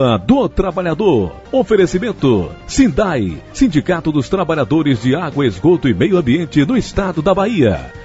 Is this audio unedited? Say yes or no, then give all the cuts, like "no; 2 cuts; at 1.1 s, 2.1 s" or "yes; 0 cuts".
no; 2 cuts; at 1.4 s, 2.6 s